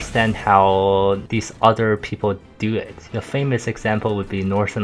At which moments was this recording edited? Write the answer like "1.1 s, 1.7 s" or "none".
1.2 s, 3.2 s